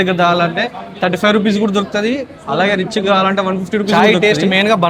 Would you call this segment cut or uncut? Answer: cut